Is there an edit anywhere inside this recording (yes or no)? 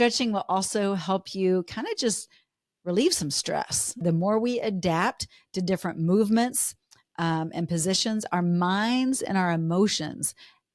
yes